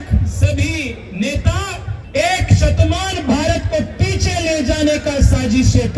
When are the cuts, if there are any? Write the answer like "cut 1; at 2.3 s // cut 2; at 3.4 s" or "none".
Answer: cut 1; at 1.9 s